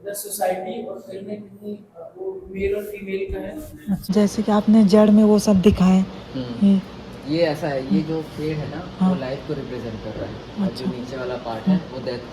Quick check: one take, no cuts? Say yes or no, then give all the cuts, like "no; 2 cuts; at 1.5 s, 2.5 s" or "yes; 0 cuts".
no; 1 cut; at 4.0 s